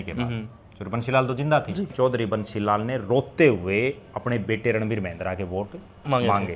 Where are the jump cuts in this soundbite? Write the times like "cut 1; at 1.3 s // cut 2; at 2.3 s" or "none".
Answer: cut 1; at 1.9 s

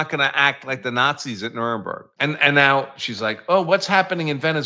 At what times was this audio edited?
cut 1; at 2.1 s

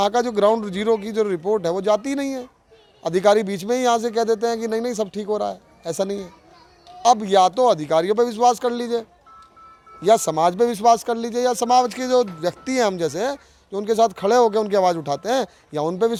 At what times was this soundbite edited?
none

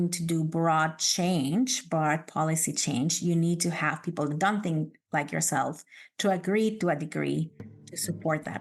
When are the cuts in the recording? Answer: cut 1; at 7.7 s

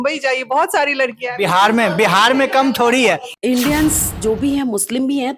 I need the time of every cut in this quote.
cut 1; at 3.3 s

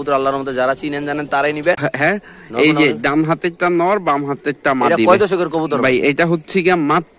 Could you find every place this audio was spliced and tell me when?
cut 1; at 1.9 s

